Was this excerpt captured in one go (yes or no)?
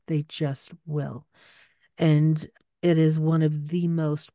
yes